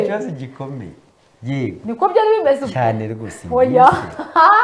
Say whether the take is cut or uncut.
uncut